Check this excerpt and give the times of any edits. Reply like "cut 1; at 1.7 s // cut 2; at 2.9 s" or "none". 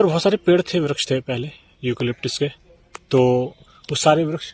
none